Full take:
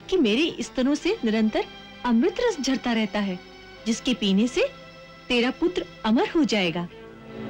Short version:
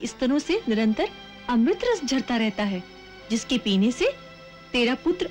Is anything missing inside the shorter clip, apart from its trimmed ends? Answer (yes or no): no